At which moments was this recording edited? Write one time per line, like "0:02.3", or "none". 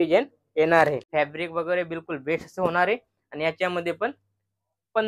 0:01.0